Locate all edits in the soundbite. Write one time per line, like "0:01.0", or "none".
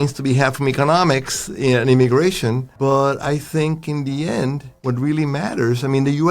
0:02.7
0:04.7